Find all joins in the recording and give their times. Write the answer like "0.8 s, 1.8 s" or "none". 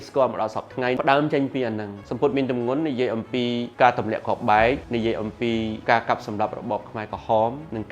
2.0 s